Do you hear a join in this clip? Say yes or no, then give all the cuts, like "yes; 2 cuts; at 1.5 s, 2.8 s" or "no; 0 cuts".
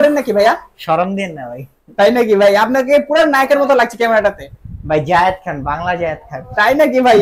no; 0 cuts